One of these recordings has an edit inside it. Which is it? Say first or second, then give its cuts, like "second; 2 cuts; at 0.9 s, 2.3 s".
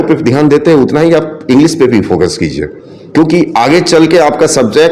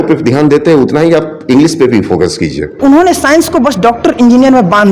second; 1 cut; at 2.8 s